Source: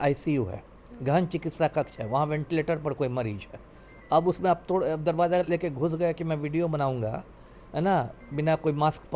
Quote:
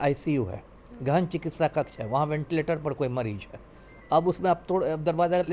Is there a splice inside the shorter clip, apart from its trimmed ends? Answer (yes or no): no